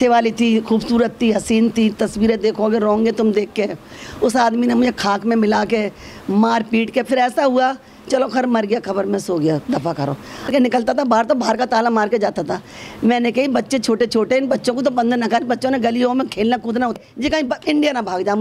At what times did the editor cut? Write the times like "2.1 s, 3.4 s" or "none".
10.6 s, 17.0 s